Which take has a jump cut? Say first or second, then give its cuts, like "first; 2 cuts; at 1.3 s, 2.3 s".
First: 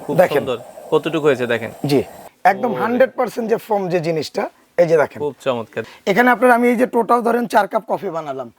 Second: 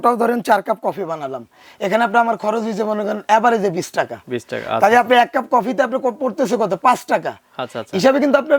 first; 2 cuts; at 2.2 s, 5.7 s